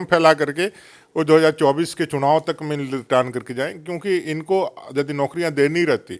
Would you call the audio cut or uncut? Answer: uncut